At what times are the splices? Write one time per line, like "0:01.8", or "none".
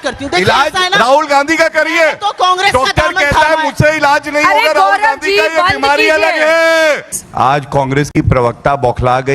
0:07.2